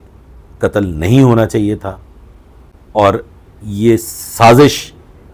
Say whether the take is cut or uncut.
uncut